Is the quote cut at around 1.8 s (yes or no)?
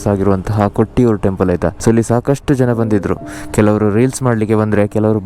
yes